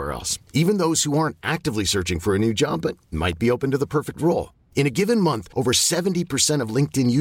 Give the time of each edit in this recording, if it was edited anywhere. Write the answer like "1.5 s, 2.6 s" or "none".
none

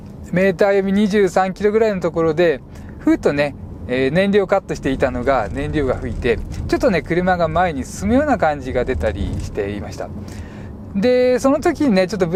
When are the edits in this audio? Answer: none

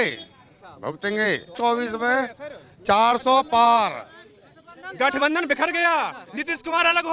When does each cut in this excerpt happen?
1.6 s

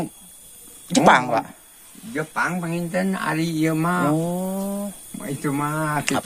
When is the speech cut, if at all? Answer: none

